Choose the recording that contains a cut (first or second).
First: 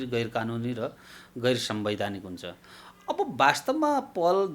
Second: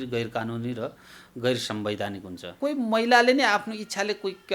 second